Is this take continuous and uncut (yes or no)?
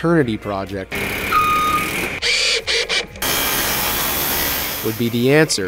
yes